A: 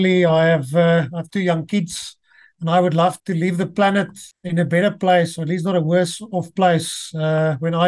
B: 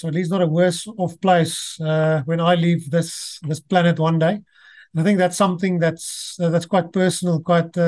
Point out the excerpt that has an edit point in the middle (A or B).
A